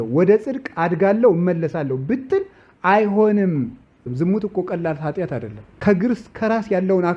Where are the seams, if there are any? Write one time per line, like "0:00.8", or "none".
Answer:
0:04.1
0:05.6